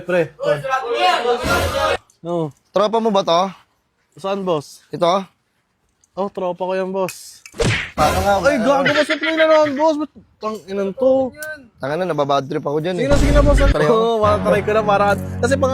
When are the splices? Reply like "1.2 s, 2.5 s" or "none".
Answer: 1.9 s, 13.7 s